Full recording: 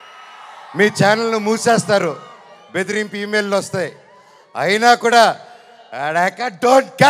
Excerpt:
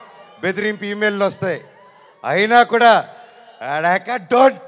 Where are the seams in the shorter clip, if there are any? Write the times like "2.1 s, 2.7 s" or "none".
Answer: none